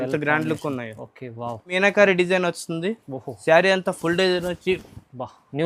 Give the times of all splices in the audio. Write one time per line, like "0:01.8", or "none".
0:01.7